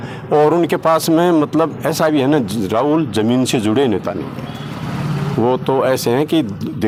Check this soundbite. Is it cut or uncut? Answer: uncut